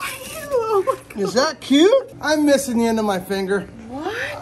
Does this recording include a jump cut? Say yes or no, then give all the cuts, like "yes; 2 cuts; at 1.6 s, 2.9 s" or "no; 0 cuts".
yes; 1 cut; at 2.1 s